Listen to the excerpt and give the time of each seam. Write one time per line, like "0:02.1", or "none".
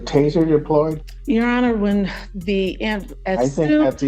0:01.1